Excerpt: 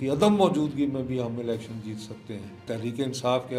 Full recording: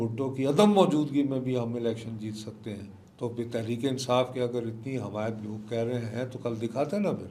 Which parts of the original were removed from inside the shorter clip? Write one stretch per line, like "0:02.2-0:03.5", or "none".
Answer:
0:03.0-0:03.5